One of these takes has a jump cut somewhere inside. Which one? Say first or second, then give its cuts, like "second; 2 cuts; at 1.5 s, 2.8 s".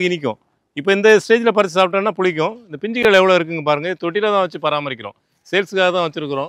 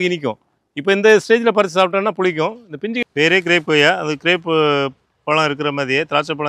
second; 1 cut; at 3.0 s